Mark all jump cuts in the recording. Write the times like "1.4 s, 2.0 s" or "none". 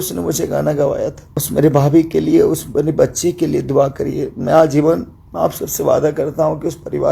1.3 s